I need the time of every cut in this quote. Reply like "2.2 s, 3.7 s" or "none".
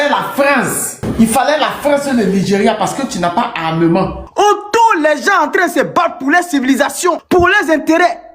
4.2 s, 7.2 s

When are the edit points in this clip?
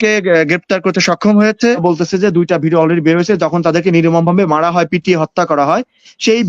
1.8 s

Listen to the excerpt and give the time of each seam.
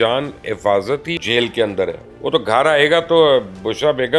1.1 s, 2.1 s

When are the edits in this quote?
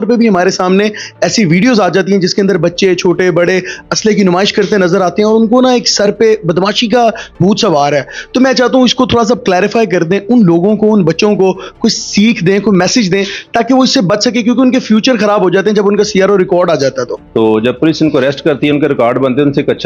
17.2 s

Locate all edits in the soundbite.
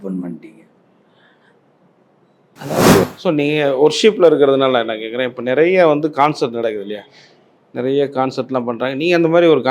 3.0 s

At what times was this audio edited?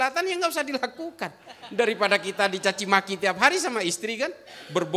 none

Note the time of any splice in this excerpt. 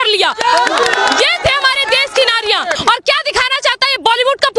2.8 s

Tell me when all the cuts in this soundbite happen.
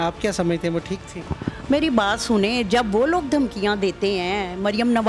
none

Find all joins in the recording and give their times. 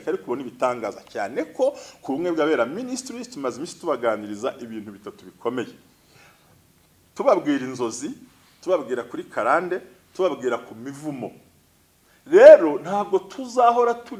none

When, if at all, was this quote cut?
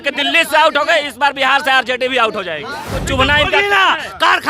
2.9 s

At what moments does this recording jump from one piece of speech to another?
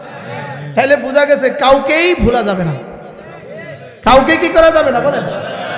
none

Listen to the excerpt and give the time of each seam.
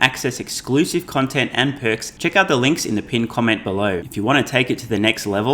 2.1 s, 4.1 s

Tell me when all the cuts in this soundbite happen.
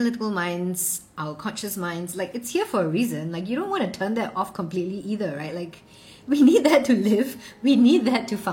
none

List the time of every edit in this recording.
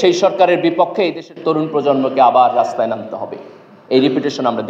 none

